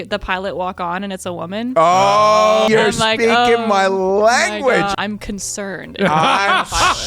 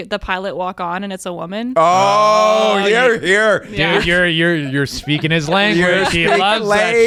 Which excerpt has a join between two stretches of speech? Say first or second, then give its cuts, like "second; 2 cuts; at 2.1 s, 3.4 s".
first; 2 cuts; at 2.7 s, 4.9 s